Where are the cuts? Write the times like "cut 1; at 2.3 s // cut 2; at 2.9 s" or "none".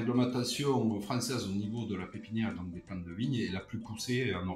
none